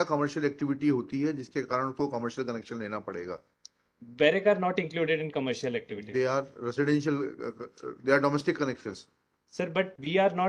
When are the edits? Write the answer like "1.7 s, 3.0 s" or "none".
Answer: none